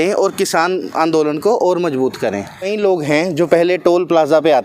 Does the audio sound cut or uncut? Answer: cut